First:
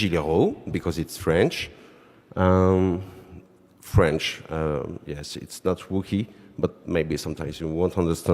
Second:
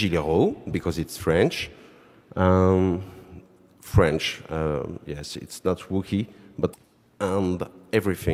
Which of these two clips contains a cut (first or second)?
first